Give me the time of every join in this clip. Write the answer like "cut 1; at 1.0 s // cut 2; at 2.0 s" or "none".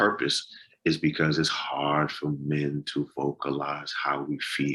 none